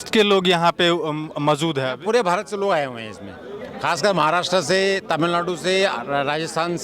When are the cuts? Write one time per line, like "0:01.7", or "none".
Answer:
none